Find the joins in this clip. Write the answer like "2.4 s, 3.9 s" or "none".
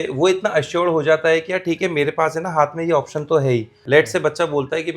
3.8 s